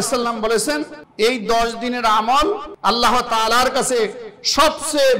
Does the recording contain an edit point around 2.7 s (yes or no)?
yes